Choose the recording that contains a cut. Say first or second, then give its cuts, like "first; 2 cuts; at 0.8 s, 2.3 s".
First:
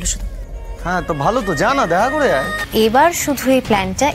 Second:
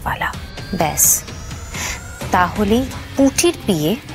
first; 1 cut; at 2.6 s